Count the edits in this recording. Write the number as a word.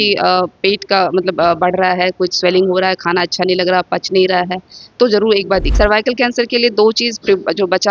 one